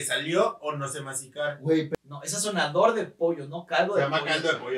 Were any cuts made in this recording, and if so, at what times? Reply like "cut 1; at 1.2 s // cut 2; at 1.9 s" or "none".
cut 1; at 1.9 s